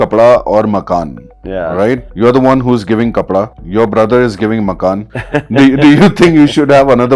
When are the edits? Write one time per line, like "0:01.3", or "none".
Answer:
0:02.1
0:03.6
0:05.1